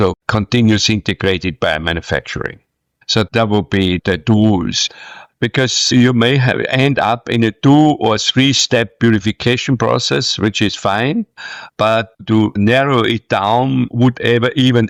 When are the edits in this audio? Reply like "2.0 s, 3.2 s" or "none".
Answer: none